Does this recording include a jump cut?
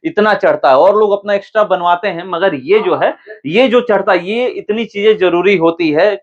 no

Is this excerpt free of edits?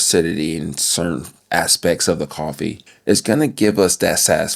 no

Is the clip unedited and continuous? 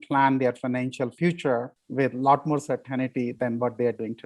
no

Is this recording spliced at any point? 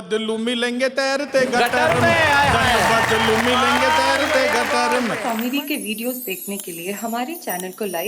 yes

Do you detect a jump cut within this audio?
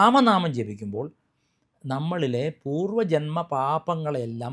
no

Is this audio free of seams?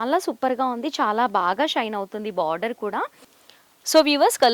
no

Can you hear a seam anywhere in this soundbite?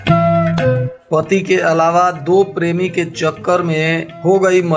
yes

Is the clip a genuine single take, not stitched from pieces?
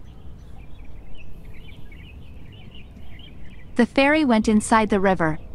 yes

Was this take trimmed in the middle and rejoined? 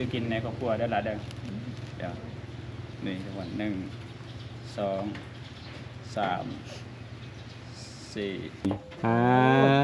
yes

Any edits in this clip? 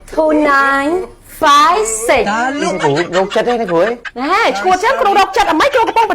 yes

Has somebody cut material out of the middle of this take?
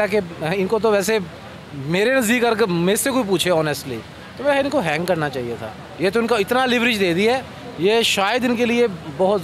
no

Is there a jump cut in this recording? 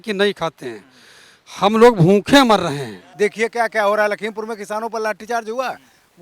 yes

